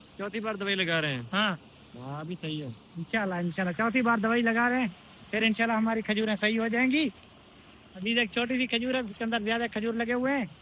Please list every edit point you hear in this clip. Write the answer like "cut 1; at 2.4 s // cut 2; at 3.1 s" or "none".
none